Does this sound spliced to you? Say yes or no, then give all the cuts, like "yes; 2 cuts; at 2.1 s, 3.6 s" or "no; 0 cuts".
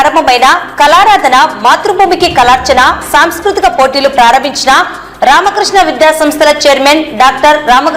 no; 0 cuts